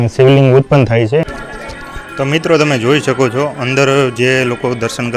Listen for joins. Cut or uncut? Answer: cut